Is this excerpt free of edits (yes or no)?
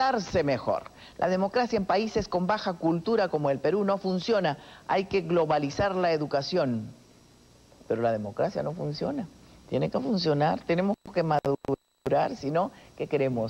no